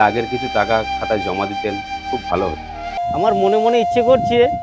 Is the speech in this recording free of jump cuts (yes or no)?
no